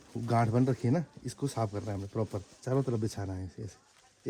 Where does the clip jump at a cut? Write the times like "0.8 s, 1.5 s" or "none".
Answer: 2.5 s